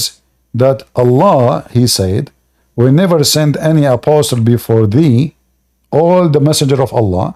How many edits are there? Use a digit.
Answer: 0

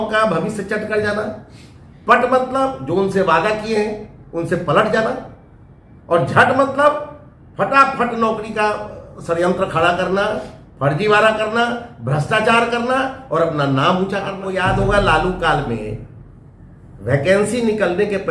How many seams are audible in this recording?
1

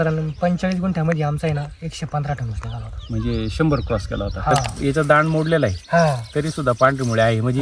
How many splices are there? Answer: 1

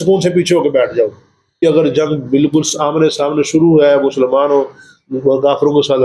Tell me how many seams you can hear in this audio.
1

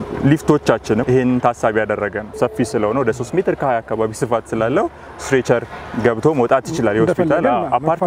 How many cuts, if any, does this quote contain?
2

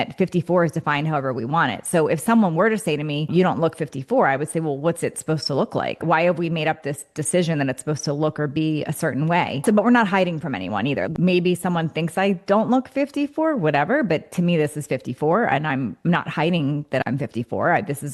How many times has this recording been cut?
3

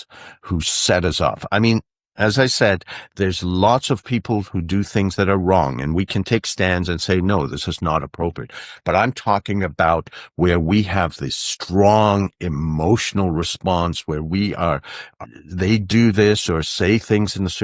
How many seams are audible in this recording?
1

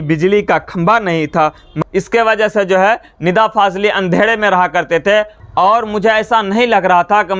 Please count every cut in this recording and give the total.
2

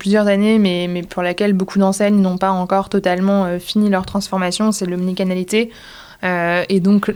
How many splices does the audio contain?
0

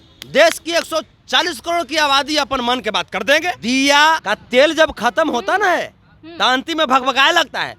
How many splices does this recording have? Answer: 2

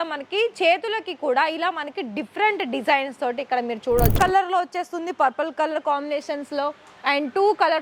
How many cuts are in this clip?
1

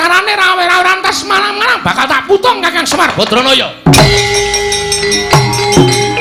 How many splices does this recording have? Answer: 0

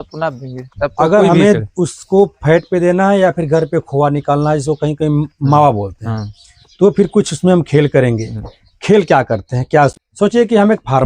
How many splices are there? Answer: 1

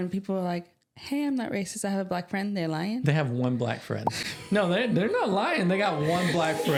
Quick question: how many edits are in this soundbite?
0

